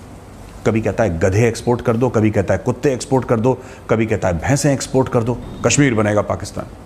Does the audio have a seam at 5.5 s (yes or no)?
yes